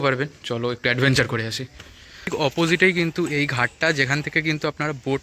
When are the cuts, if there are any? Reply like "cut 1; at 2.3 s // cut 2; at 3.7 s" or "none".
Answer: cut 1; at 2.3 s

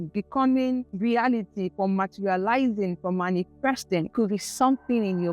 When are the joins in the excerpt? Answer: cut 1; at 0.9 s // cut 2; at 4.1 s

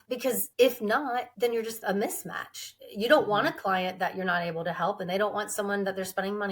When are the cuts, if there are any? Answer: cut 1; at 1.8 s

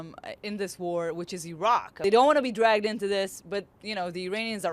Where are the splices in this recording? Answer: cut 1; at 1.9 s

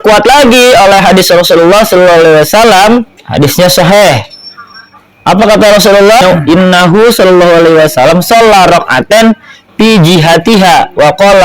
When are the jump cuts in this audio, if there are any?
cut 1; at 3.2 s // cut 2; at 6.2 s

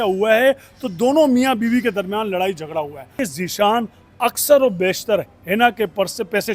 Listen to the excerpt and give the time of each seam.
cut 1; at 3.2 s

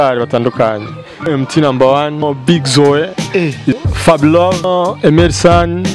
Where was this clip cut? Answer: cut 1; at 1.3 s // cut 2; at 2.2 s // cut 3; at 3.8 s // cut 4; at 4.6 s

